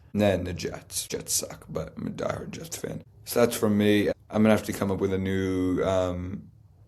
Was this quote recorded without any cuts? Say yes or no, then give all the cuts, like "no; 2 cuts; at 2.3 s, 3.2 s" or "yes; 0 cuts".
no; 3 cuts; at 0.9 s, 3.1 s, 4.1 s